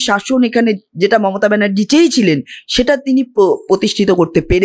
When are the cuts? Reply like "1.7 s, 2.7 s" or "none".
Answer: none